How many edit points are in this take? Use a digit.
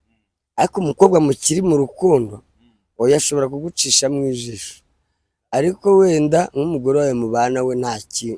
0